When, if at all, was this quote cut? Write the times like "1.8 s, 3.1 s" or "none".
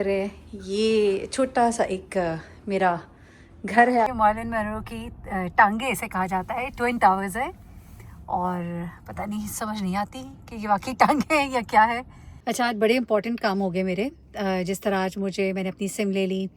4.1 s, 12.3 s